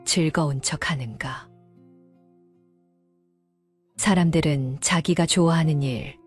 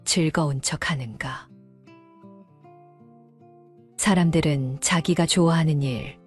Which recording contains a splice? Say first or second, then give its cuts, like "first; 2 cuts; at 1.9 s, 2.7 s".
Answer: second; 2 cuts; at 1.5 s, 4.0 s